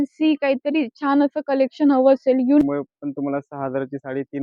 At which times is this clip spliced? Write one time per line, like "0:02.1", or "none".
0:02.6